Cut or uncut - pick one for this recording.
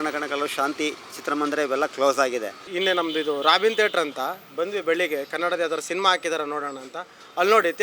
cut